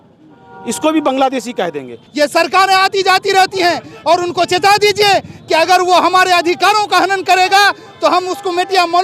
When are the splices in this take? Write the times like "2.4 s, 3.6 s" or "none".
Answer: 2.0 s